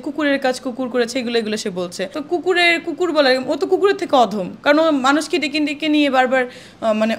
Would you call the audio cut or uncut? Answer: uncut